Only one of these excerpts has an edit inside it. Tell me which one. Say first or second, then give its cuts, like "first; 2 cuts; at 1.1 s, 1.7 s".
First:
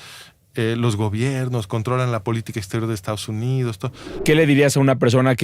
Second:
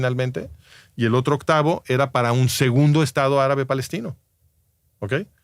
first; 1 cut; at 4.1 s